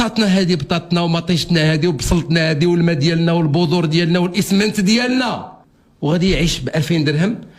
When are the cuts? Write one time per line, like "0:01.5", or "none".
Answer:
0:05.5